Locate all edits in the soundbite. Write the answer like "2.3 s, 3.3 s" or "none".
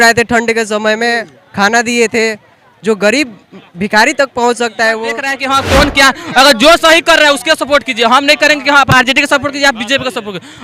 5.3 s